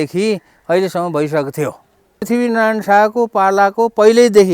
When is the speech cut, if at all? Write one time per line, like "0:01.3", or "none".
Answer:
0:02.2

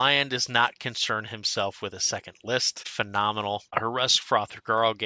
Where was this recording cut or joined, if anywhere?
0:02.8
0:03.7

